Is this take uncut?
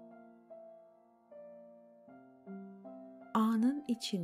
no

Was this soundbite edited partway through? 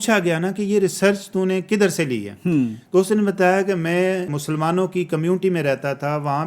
yes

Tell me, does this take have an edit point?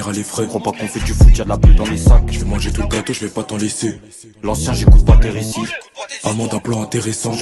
no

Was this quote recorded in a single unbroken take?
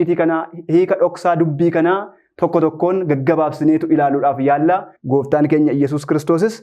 no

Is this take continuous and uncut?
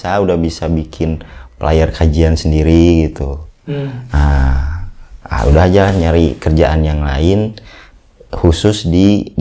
yes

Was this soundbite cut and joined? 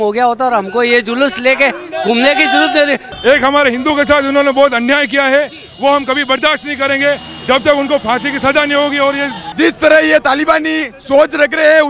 yes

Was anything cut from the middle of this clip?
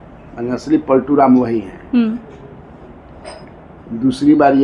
no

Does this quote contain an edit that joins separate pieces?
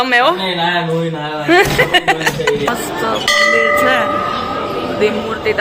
yes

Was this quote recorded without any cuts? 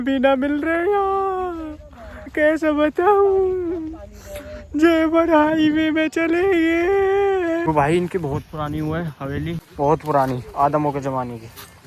no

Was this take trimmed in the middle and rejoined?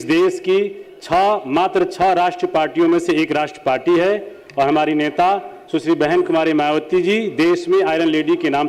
no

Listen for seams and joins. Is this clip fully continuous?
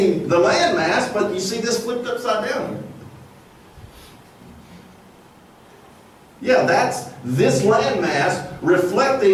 yes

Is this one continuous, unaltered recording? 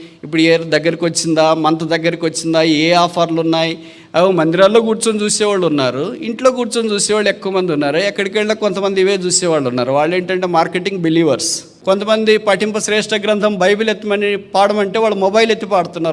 no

